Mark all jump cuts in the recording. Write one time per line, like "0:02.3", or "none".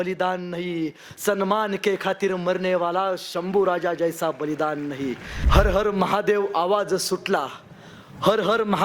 0:05.3